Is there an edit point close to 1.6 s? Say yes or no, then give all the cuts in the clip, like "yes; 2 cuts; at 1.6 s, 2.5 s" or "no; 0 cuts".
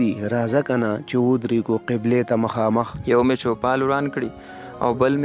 no; 1 cut; at 3.0 s